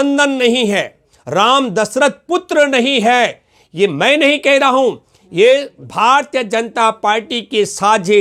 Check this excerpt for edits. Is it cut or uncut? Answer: uncut